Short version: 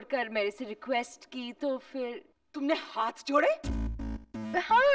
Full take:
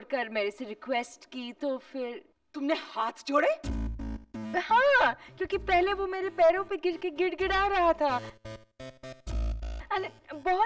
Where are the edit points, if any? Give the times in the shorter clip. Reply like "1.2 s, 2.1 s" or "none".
none